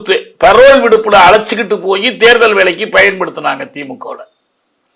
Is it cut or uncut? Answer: uncut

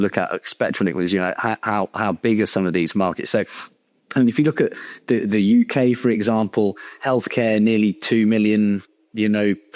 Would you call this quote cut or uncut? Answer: uncut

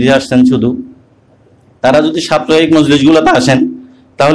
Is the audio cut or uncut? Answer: uncut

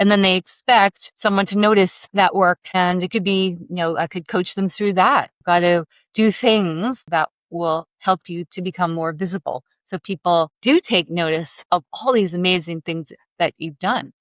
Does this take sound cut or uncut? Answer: cut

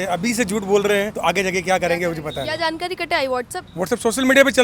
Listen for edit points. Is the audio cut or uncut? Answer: uncut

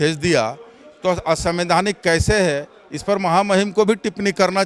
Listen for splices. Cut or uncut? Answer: uncut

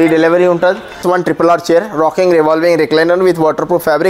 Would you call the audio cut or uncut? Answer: cut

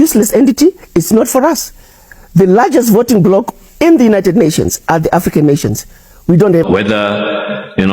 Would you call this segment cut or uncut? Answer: cut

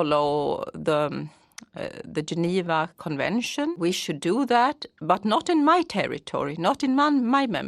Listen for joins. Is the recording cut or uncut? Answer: cut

